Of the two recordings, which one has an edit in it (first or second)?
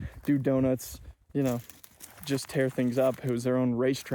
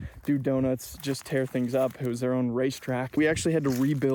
second